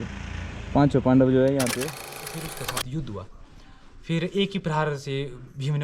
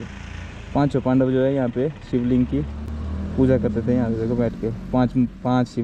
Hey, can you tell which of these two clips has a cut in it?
first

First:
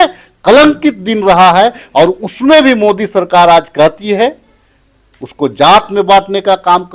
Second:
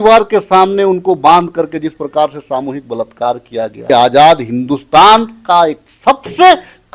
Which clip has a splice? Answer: second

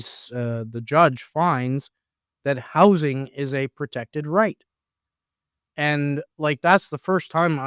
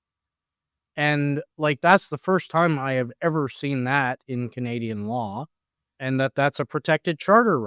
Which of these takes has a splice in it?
second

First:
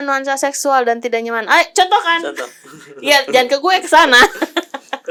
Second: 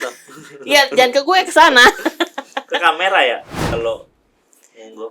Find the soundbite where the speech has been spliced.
second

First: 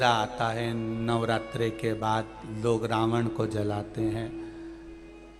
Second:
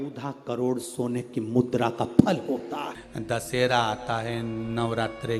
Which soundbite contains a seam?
second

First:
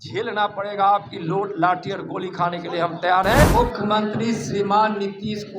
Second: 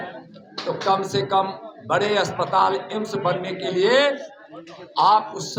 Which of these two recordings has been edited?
first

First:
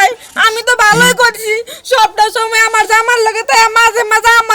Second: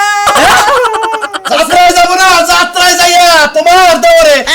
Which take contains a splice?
second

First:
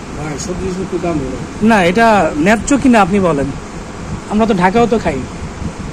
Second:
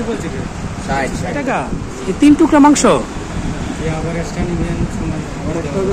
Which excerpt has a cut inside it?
second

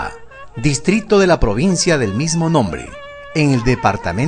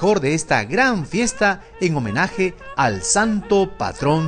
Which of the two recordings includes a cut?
second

